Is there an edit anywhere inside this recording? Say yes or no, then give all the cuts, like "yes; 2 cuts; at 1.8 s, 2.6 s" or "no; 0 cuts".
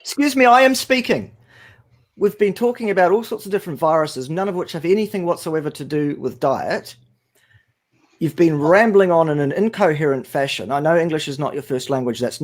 no; 0 cuts